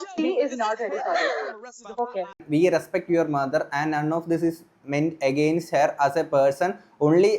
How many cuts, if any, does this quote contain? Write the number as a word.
one